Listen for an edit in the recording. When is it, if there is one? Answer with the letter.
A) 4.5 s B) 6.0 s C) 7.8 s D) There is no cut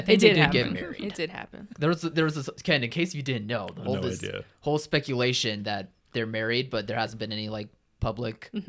D